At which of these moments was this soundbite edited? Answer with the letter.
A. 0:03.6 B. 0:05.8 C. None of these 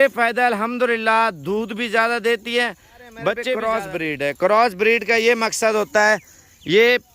A